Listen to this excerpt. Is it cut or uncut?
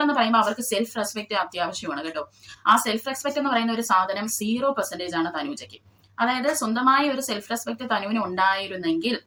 uncut